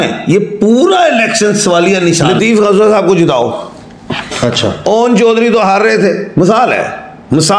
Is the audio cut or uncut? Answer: cut